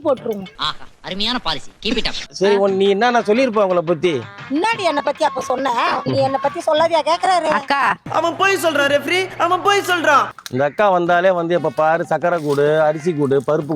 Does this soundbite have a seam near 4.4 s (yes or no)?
no